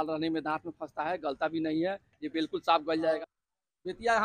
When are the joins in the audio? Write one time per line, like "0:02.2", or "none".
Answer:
0:03.2